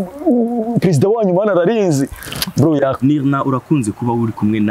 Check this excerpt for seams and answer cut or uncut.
cut